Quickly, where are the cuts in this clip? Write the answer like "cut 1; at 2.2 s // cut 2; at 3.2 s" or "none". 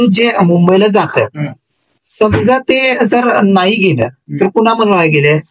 none